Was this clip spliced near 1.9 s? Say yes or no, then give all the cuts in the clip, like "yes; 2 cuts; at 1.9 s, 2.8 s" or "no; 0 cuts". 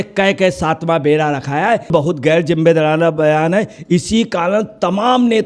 yes; 1 cut; at 1.9 s